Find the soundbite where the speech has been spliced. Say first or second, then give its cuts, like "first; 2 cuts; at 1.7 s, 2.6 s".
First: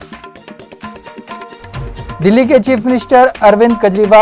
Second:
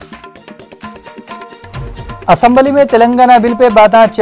first; 1 cut; at 1.5 s